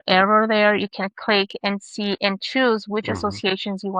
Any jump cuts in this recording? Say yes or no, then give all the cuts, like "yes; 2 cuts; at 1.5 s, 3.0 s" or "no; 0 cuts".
no; 0 cuts